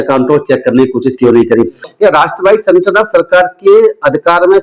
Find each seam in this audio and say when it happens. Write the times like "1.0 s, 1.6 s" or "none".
1.8 s